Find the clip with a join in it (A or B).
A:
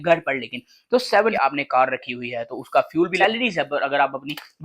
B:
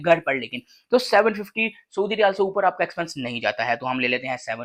A